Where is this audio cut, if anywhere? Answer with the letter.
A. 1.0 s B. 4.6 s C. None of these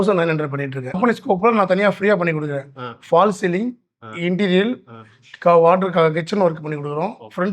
A